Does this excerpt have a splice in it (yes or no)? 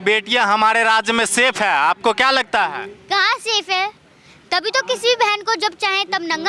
no